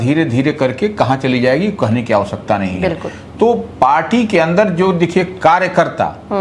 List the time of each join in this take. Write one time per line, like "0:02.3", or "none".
none